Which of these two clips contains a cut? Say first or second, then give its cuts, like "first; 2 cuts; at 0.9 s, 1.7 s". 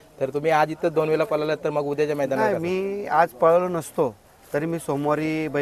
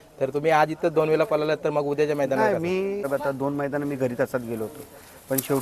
second; 1 cut; at 3.1 s